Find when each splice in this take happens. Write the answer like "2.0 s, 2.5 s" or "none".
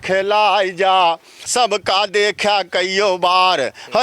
1.3 s